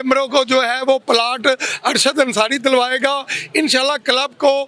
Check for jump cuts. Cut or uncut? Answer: uncut